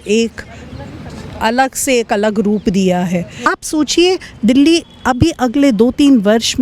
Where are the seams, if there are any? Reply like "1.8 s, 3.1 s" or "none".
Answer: 3.3 s